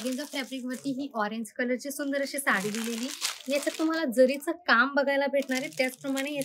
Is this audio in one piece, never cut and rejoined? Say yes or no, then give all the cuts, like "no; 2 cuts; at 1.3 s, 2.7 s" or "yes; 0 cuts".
yes; 0 cuts